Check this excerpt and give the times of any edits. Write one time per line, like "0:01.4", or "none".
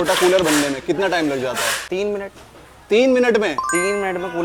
none